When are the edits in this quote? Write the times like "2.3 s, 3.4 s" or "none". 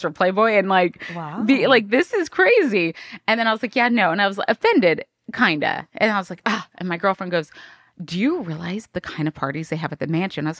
none